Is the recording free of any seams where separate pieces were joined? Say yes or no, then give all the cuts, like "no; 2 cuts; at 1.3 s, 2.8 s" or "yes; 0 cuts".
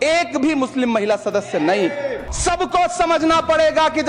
no; 1 cut; at 2.3 s